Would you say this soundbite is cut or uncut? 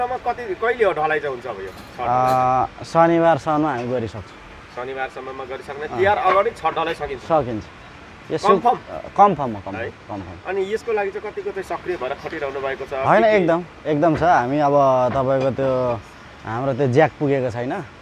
uncut